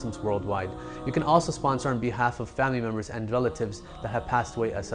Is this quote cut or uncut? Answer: uncut